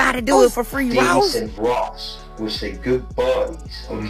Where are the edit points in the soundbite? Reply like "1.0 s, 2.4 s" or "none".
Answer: 1.3 s